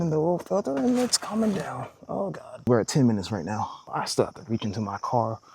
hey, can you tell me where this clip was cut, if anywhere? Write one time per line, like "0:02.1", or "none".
none

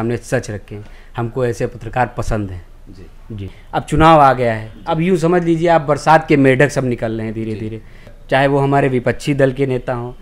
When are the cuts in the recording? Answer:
0:03.6
0:08.1

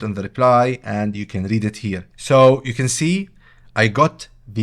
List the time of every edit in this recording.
0:02.1

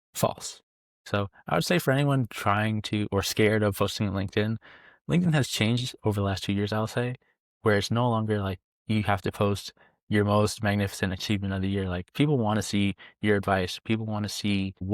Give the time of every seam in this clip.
0:01.0

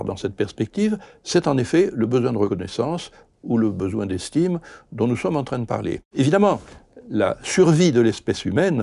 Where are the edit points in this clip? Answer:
0:02.5
0:06.0

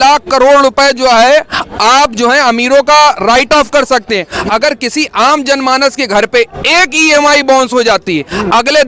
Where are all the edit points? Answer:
none

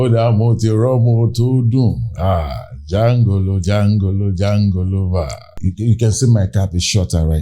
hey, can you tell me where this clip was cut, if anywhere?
0:05.5

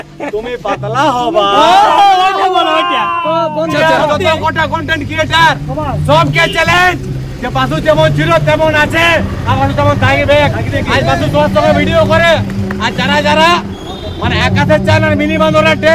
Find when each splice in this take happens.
0:03.7

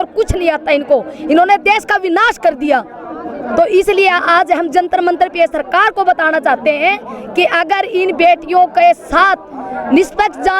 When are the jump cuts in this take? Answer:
none

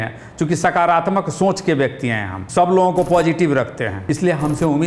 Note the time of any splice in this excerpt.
0:02.4
0:04.0

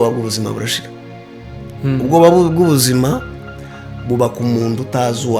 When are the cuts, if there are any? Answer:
none

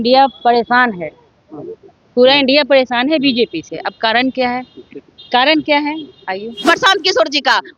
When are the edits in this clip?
0:06.6

